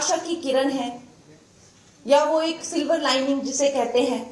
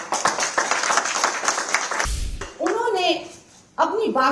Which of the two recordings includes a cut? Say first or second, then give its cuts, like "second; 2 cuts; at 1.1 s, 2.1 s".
second; 1 cut; at 2.4 s